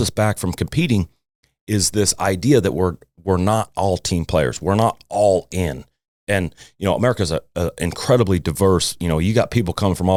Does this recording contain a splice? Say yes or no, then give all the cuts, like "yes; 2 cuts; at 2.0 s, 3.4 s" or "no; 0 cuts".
no; 0 cuts